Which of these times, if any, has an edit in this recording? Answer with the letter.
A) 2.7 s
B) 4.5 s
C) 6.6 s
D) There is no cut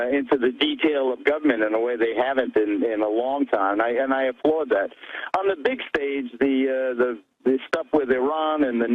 D